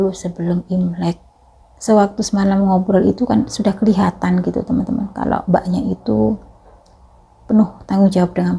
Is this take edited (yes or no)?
yes